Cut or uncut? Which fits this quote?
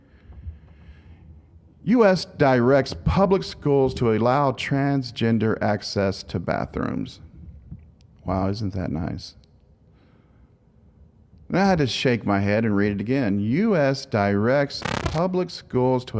cut